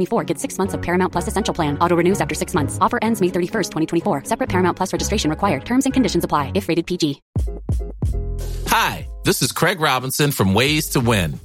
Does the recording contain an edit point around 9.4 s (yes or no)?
no